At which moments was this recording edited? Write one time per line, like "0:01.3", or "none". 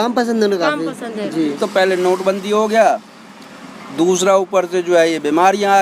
0:01.6